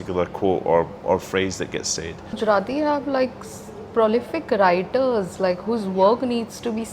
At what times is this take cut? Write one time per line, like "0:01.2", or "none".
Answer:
0:02.4